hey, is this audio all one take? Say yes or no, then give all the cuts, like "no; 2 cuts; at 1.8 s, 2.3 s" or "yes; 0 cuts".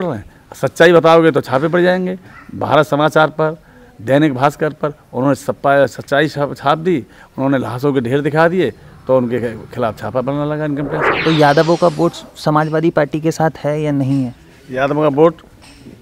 no; 1 cut; at 11.2 s